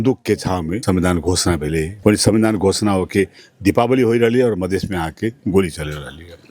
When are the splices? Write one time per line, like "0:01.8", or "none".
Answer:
0:00.8
0:02.0